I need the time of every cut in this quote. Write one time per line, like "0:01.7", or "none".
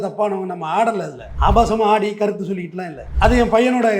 0:01.2
0:03.0